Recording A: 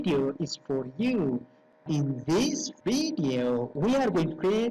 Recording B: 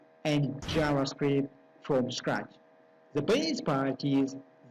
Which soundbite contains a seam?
A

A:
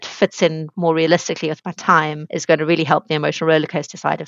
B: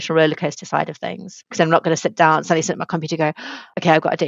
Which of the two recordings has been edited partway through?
A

